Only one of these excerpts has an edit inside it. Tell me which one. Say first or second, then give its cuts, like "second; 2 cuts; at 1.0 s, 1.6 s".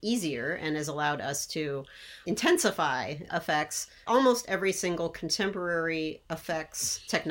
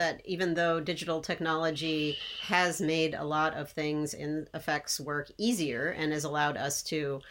first; 2 cuts; at 3.2 s, 6.2 s